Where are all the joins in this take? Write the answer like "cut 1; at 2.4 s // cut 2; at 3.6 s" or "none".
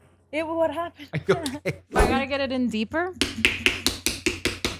cut 1; at 2.0 s